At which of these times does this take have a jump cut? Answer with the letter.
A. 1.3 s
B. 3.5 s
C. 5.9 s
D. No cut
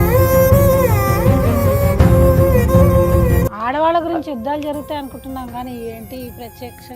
B